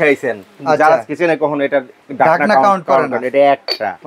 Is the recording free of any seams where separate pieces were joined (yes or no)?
yes